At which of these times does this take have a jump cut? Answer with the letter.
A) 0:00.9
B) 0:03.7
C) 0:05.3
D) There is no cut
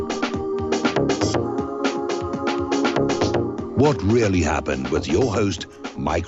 B